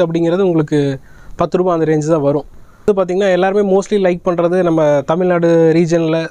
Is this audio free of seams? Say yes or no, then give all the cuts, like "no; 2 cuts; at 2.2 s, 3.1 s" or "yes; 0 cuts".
no; 1 cut; at 2.8 s